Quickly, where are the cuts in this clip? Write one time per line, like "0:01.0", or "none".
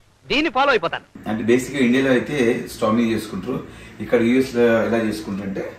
0:01.1